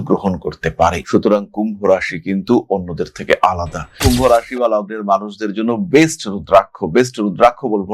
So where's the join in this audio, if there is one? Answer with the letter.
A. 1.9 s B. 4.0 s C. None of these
B